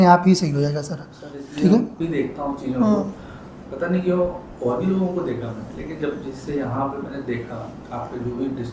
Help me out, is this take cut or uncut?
cut